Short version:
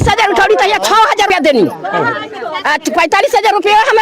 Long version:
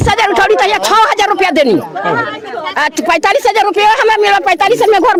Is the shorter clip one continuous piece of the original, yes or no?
no